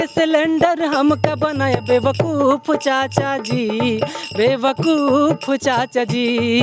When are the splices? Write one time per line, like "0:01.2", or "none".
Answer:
none